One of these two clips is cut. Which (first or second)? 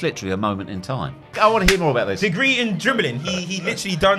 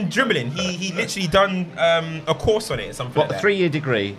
first